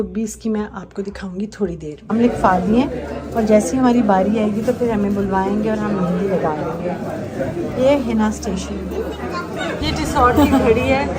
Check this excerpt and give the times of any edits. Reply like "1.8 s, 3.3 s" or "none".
2.1 s, 9.8 s

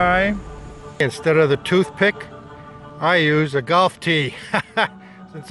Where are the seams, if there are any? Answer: 1.0 s

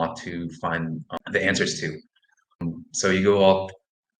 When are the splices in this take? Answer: 1.1 s, 2.6 s

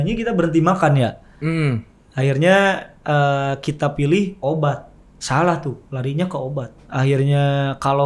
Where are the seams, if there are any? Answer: 6.8 s

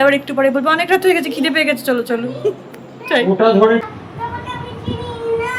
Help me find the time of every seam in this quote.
3.9 s

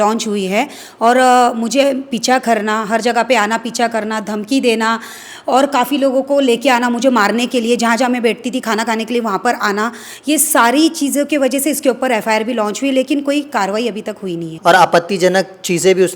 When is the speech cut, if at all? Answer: 14.5 s

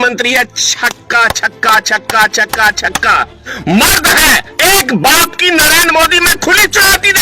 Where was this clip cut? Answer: 3.5 s

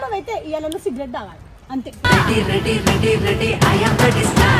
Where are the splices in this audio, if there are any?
none

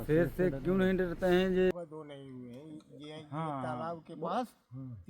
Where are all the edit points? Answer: 1.7 s

